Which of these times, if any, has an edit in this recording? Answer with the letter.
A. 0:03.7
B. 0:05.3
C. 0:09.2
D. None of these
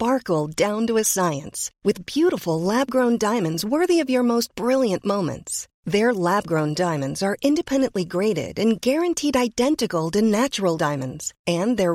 D